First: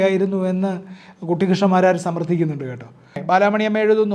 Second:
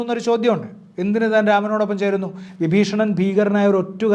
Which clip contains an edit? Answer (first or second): first